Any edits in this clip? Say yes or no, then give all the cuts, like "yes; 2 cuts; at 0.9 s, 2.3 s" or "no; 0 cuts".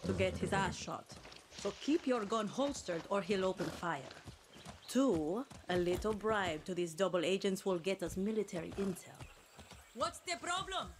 yes; 1 cut; at 9.7 s